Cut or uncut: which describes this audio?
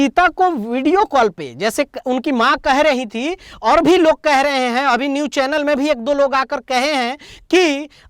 uncut